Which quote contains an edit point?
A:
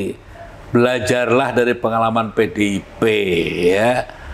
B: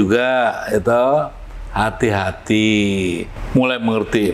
B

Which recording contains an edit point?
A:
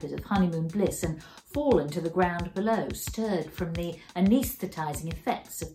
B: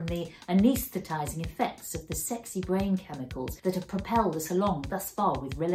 B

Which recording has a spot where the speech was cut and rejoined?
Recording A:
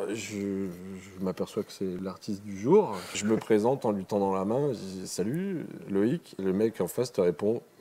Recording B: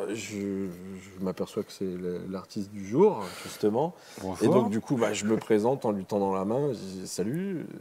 A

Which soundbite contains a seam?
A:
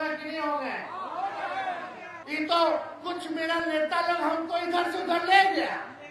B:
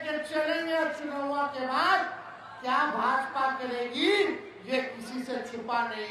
A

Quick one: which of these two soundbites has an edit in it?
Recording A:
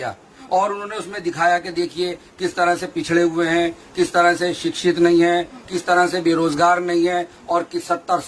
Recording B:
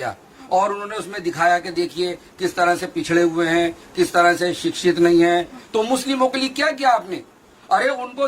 B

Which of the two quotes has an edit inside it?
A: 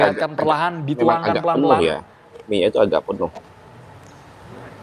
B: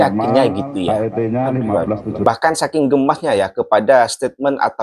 B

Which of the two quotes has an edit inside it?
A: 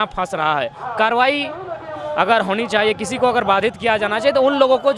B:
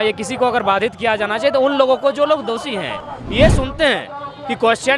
B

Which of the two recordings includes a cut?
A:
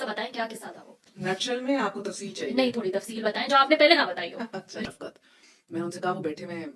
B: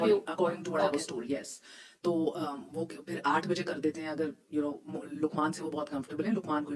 A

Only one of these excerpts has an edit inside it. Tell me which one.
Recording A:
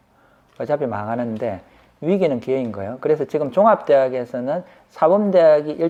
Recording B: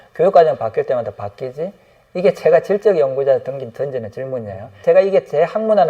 B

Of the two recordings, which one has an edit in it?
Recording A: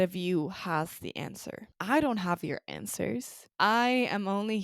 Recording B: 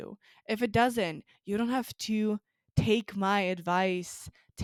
A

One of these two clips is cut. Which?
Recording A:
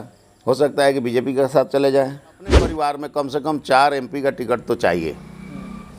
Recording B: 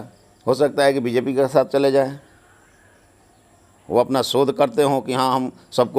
A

